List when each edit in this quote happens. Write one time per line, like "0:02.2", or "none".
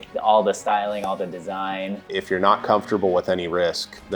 0:02.1

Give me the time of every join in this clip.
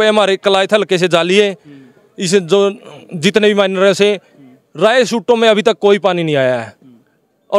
none

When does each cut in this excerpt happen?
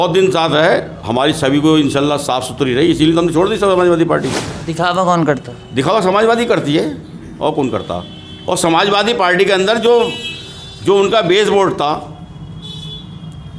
0:04.6

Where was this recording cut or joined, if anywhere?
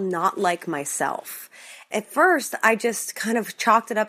none

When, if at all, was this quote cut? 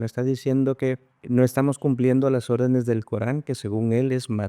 0:01.1

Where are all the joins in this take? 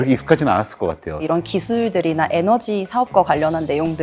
0:01.2

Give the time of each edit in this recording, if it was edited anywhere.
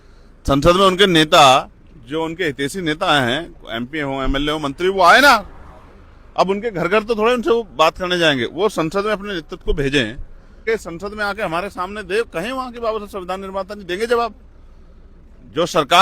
0:10.6

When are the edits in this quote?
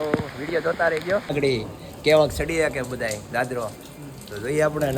0:01.3

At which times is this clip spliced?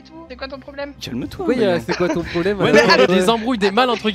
0:01.0
0:03.1

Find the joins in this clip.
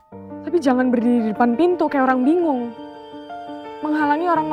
none

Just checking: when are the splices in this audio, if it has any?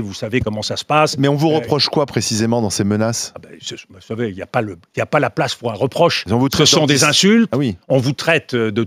none

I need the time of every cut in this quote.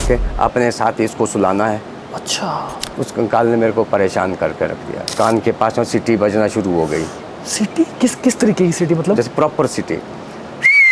0:02.8
0:05.1

